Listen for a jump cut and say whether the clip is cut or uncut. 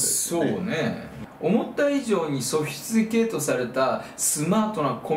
cut